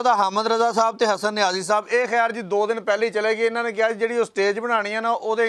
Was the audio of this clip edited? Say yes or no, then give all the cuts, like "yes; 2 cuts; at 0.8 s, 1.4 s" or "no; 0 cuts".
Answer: no; 0 cuts